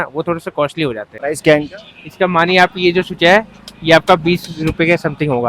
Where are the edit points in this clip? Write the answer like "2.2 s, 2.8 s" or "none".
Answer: 1.1 s